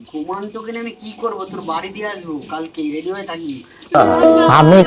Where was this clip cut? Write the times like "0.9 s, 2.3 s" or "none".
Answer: 3.9 s